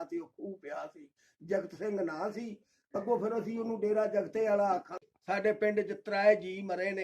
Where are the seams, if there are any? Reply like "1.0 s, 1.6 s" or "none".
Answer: 5.1 s